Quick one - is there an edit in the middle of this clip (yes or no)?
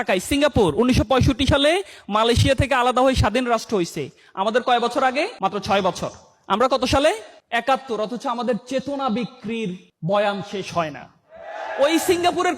yes